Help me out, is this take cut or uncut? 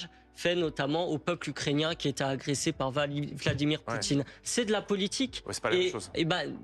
uncut